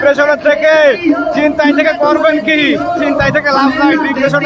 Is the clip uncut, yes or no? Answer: yes